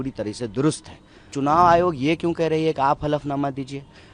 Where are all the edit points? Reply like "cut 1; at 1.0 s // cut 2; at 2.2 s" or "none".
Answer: cut 1; at 1.3 s